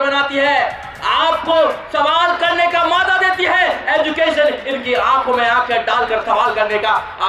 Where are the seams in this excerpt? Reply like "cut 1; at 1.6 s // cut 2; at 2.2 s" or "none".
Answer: none